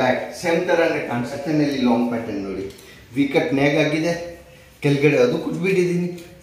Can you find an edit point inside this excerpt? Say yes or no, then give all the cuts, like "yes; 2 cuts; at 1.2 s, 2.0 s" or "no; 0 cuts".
yes; 1 cut; at 1.4 s